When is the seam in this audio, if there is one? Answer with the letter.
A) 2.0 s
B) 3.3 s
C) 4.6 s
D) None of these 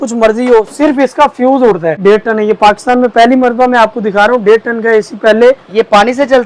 A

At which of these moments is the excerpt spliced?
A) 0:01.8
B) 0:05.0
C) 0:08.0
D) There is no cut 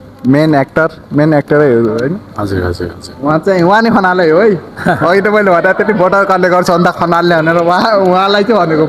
D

